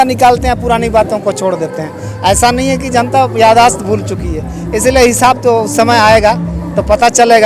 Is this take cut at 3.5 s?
no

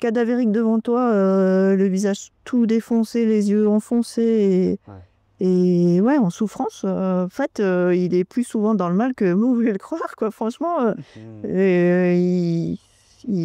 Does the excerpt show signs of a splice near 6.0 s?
no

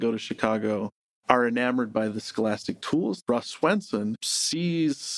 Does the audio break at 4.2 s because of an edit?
yes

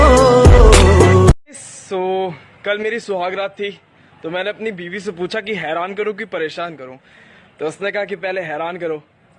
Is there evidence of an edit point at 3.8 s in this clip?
no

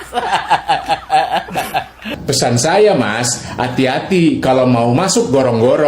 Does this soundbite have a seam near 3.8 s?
no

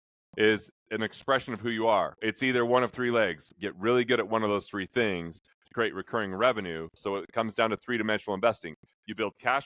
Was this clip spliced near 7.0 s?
yes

